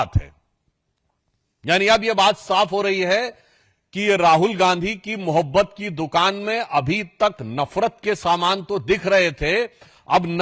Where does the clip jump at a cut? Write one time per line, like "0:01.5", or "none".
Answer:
none